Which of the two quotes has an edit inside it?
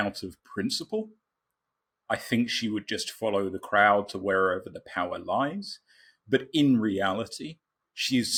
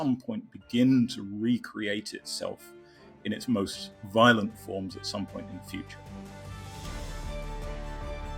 second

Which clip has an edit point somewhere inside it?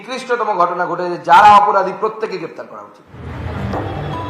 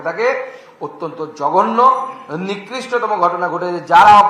first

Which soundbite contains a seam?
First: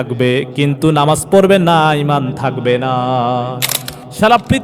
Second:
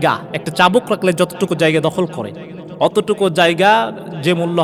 first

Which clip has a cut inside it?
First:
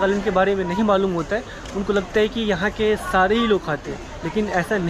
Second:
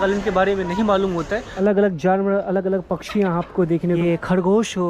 second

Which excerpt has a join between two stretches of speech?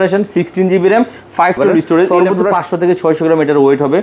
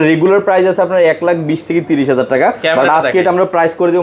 first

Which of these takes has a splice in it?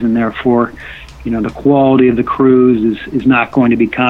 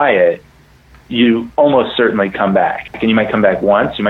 second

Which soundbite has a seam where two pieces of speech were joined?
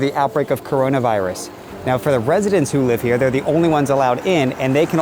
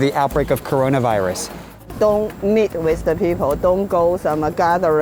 second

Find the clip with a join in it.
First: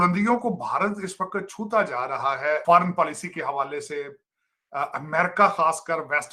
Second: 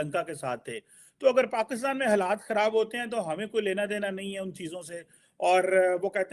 first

